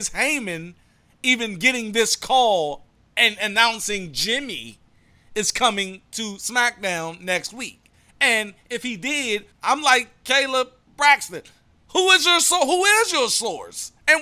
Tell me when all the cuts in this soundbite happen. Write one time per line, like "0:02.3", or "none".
0:09.5

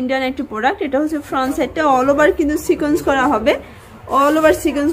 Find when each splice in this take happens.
none

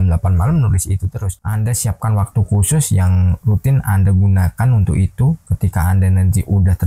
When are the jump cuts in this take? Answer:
0:01.3

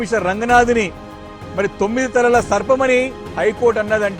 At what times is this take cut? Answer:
none

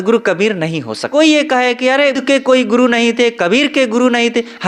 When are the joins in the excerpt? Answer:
0:01.0
0:02.2

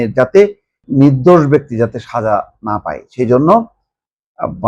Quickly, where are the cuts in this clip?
none

